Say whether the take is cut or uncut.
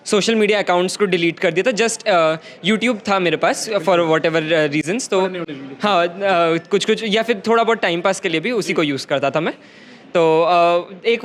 uncut